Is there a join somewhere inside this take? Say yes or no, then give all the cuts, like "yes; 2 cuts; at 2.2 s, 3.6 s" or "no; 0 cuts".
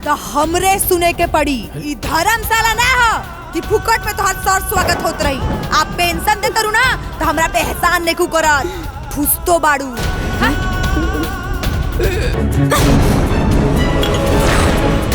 yes; 1 cut; at 12.3 s